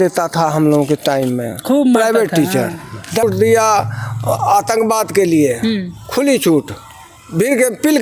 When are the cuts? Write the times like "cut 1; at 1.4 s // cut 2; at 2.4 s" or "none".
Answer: cut 1; at 3.2 s